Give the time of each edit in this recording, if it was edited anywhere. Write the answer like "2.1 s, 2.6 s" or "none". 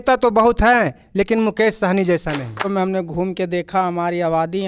2.7 s